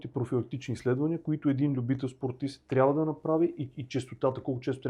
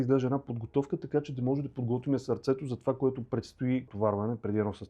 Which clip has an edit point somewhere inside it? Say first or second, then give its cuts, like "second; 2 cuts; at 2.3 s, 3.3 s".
second; 1 cut; at 3.9 s